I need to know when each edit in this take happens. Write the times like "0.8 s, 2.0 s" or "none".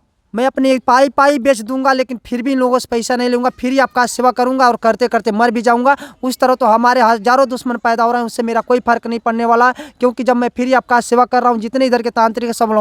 none